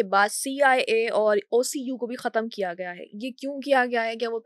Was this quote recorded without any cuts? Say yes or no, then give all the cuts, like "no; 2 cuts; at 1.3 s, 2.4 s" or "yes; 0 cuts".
yes; 0 cuts